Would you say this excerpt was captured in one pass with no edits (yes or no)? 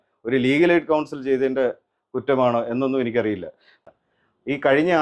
no